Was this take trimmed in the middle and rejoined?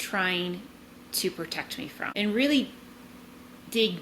yes; 1 cut; at 2.1 s

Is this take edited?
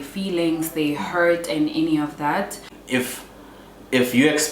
yes; 1 cut; at 2.7 s

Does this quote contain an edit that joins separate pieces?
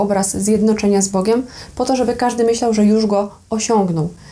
no; 0 cuts

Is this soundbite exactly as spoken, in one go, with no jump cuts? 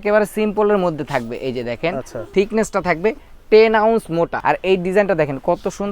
no; 2 cuts; at 2.1 s, 4.4 s

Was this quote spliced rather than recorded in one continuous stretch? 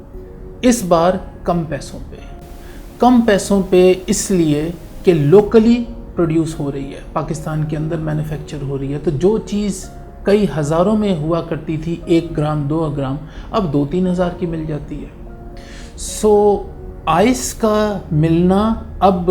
no; 0 cuts

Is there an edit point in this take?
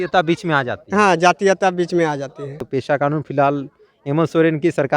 yes; 1 cut; at 2.6 s

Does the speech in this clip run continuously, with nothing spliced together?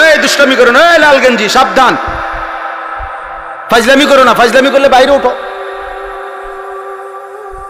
yes; 0 cuts

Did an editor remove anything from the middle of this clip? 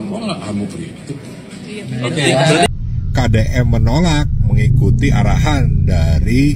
yes; 1 cut; at 2.7 s

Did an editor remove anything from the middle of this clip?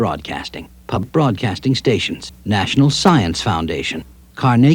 yes; 1 cut; at 1.0 s

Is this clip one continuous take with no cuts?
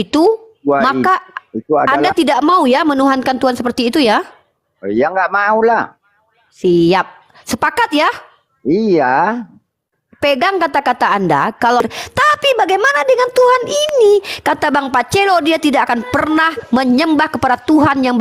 no; 1 cut; at 11.8 s

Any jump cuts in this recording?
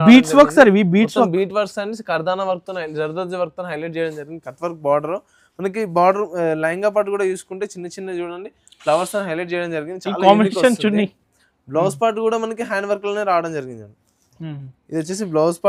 no; 0 cuts

